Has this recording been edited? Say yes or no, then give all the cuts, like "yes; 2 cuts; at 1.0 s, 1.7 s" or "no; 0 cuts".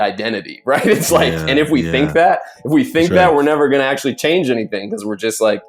no; 0 cuts